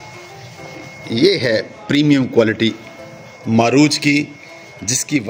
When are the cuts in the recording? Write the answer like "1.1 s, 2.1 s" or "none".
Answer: none

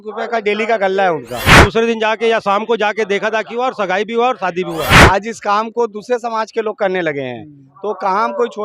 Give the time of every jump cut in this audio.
1.7 s, 4.9 s

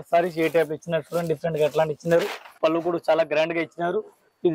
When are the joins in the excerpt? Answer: 2.6 s

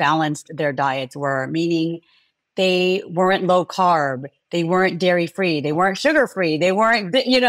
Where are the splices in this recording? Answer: none

